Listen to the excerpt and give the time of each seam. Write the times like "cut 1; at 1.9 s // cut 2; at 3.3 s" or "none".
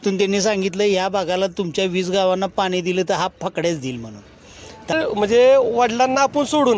cut 1; at 4.9 s

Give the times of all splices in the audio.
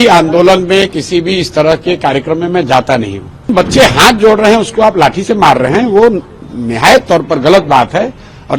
cut 1; at 3.5 s

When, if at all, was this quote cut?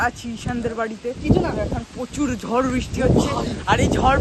none

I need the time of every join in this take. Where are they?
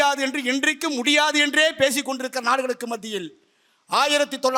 none

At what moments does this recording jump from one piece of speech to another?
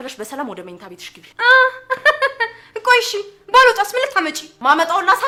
none

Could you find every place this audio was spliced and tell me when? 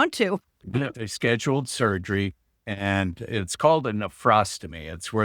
cut 1; at 0.9 s

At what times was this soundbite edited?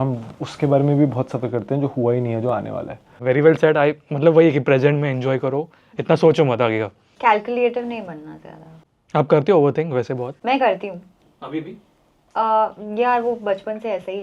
none

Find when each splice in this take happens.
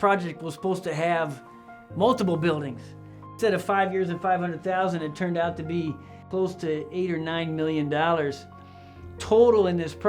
cut 1; at 3.3 s // cut 2; at 6.2 s

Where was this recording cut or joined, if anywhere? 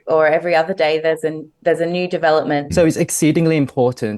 cut 1; at 2.7 s

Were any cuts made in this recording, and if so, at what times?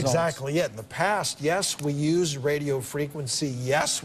none

